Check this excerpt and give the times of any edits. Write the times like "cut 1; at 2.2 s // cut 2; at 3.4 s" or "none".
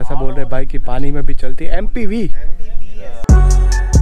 cut 1; at 3.1 s